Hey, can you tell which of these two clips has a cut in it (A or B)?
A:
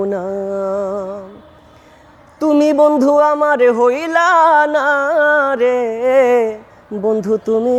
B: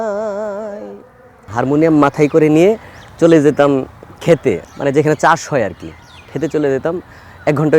B